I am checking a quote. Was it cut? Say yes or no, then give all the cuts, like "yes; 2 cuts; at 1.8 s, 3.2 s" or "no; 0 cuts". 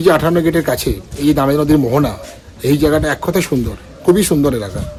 no; 0 cuts